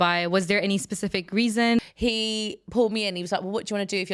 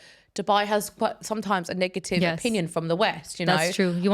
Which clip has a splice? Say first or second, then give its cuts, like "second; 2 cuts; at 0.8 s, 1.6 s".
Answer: first; 1 cut; at 1.8 s